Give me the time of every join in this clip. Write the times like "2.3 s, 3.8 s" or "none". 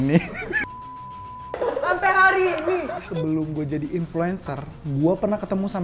3.1 s

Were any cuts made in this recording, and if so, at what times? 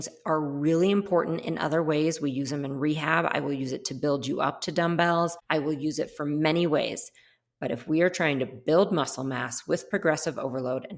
5.4 s

